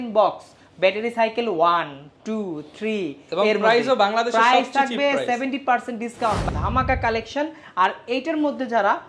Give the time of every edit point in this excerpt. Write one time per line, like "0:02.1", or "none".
0:06.4

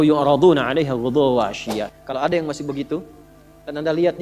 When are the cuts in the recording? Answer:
0:02.0

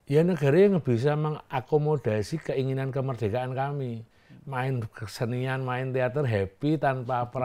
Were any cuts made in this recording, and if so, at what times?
none

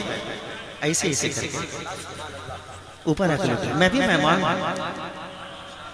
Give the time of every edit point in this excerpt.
none

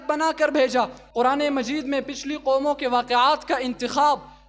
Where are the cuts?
0:01.0

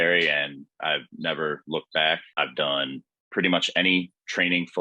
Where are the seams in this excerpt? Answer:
0:02.3

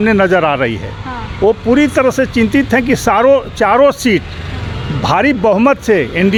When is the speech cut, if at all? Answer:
none

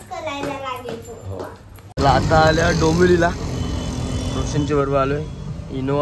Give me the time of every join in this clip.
0:01.8

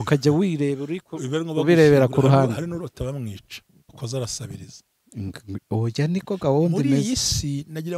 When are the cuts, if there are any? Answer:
0:04.0

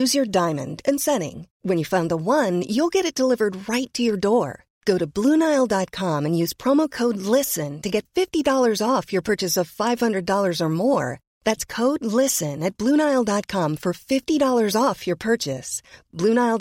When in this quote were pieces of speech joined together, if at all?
none

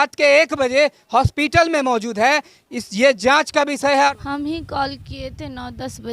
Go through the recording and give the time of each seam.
0:04.2

